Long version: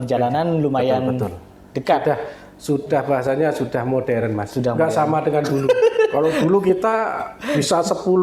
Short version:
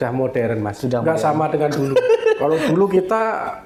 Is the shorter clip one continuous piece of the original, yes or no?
yes